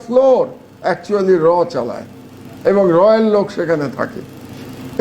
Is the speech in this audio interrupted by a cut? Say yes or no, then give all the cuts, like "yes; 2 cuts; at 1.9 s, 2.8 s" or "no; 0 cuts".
no; 0 cuts